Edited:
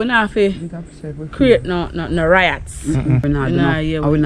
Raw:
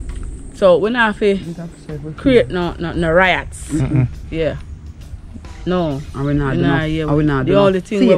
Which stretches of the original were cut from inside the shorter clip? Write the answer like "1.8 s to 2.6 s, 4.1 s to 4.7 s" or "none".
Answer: 4.1 s to 6.3 s